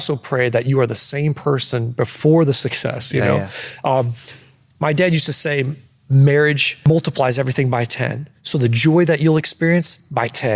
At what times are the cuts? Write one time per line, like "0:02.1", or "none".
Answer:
0:06.8